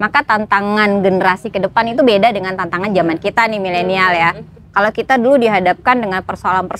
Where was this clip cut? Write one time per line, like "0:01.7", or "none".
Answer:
none